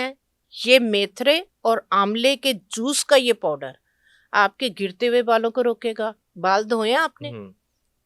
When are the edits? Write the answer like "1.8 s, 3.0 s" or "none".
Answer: 6.2 s